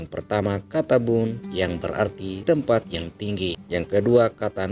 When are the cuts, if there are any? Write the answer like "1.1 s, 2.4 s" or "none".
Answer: 1.8 s, 3.6 s